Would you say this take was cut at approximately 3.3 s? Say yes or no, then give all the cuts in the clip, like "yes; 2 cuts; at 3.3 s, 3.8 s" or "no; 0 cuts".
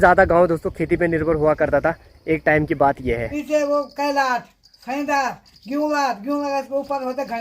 yes; 1 cut; at 3.3 s